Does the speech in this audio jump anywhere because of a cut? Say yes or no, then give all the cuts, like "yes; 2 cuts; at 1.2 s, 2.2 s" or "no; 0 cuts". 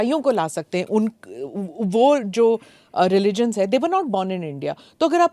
no; 0 cuts